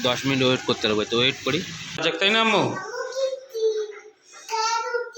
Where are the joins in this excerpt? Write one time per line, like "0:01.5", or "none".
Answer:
0:02.0